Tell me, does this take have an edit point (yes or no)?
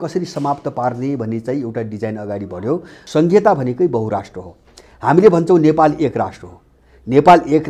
yes